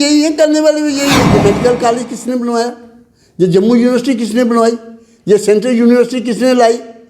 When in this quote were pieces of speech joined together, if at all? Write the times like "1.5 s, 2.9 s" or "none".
1.3 s